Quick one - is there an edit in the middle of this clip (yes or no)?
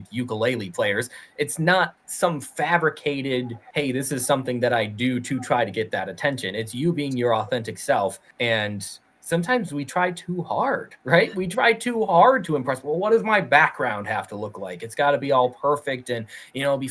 yes